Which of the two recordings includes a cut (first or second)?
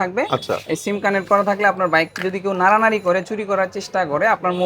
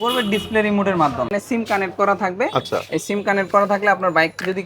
second